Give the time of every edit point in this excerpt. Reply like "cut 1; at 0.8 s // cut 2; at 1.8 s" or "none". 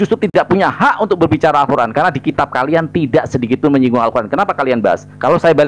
none